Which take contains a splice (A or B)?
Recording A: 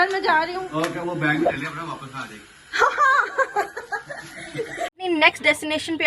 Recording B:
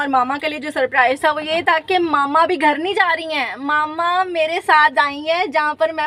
A